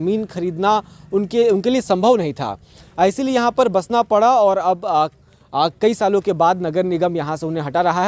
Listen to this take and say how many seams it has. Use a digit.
0